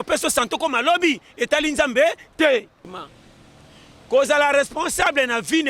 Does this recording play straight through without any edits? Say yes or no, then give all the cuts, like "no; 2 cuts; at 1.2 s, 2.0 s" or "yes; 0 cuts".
no; 1 cut; at 3.0 s